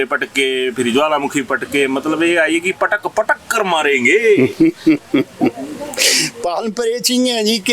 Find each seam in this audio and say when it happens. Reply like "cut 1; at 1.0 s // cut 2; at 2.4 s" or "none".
none